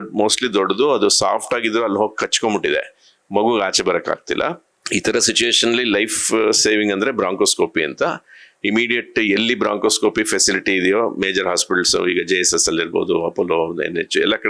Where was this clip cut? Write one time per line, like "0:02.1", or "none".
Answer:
none